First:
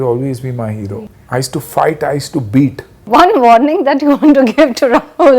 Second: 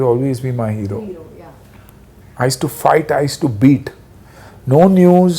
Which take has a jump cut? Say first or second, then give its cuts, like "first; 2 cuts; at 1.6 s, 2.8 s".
first; 2 cuts; at 1.1 s, 2.9 s